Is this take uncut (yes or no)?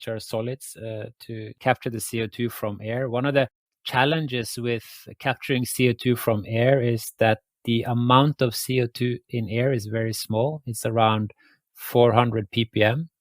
no